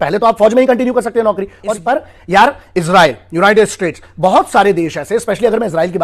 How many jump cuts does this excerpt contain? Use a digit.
1